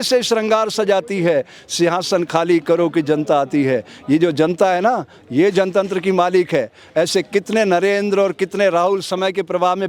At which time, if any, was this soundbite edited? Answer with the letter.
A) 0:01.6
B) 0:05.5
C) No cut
C